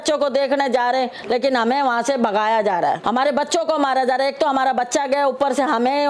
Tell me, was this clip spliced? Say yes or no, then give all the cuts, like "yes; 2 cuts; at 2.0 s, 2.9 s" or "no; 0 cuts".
no; 0 cuts